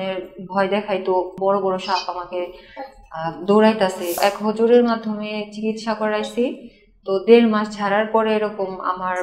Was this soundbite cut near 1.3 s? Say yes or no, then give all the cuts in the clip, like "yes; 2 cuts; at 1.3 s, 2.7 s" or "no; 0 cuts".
yes; 2 cuts; at 1.3 s, 4.2 s